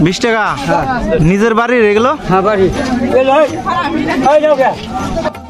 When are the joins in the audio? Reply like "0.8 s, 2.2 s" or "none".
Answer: none

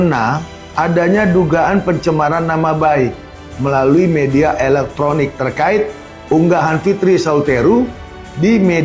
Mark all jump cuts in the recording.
none

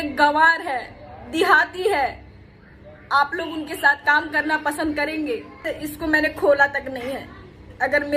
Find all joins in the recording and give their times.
5.7 s

